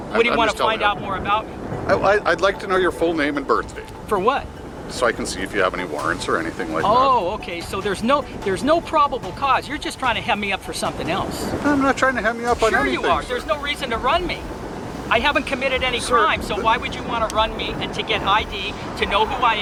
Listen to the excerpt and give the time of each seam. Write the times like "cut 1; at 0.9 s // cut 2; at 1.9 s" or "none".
none